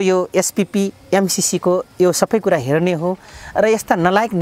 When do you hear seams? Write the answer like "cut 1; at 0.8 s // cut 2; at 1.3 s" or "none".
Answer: none

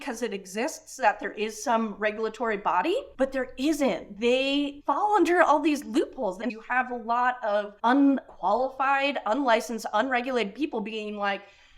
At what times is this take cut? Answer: cut 1; at 6.4 s // cut 2; at 7.7 s

